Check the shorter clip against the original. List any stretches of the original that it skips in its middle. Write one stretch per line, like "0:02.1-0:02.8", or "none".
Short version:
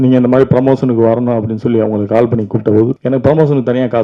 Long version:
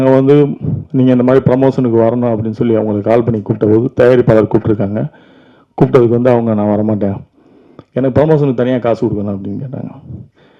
0:03.9-0:07.9